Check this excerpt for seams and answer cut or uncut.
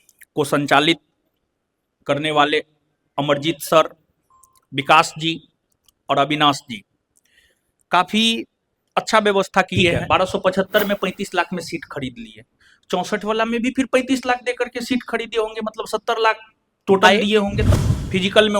cut